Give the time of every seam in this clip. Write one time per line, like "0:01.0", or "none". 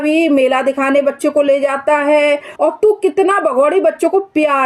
0:02.5